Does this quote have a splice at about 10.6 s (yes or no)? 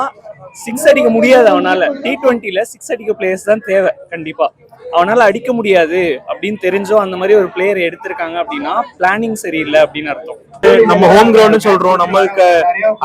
yes